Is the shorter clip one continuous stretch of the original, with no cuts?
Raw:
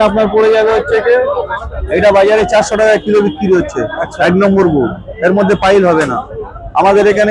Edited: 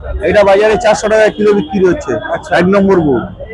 yes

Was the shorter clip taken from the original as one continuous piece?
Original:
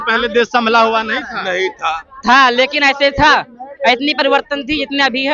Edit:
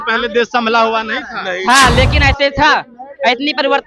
no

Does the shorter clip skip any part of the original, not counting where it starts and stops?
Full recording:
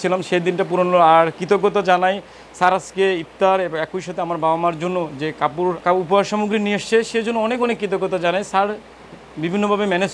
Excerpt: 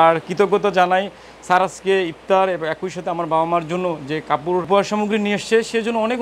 yes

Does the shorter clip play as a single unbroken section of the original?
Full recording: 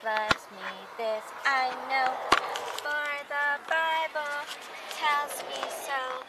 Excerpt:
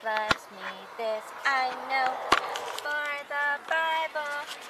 yes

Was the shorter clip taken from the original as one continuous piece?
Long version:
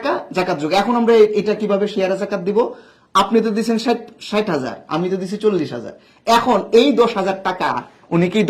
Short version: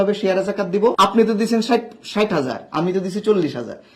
no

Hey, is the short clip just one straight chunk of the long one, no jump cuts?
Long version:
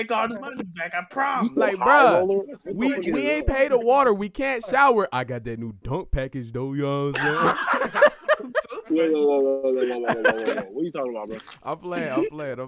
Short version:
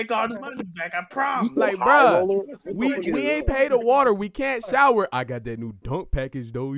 yes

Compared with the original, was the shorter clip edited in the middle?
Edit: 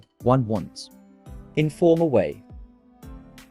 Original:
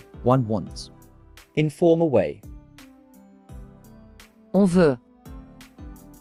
no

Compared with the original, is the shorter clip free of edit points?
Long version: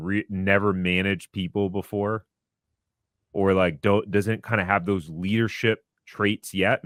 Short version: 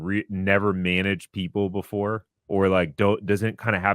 no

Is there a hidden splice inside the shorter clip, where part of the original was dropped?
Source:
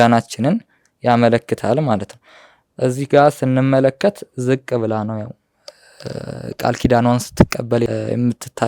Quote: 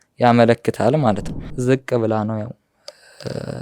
yes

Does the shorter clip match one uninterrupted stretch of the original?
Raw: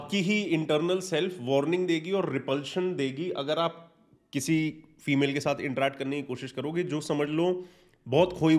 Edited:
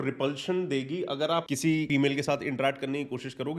no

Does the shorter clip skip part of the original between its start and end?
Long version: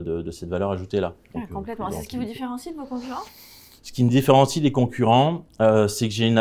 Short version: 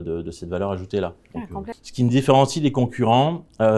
yes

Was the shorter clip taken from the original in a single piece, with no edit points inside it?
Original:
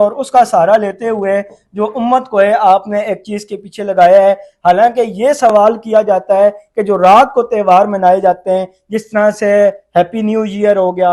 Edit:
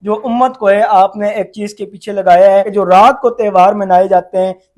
no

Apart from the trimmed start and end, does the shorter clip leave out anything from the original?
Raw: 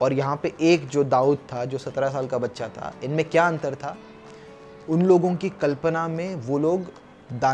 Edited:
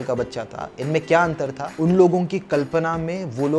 yes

